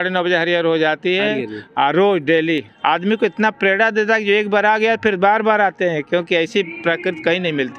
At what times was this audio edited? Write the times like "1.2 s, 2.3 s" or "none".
2.7 s